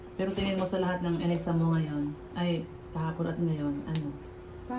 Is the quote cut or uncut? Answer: uncut